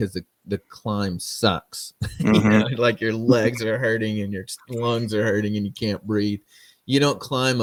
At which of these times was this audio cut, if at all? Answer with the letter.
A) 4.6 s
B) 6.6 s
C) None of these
C